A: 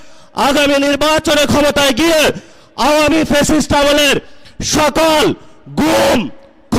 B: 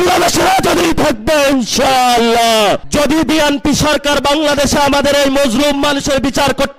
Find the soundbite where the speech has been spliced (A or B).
B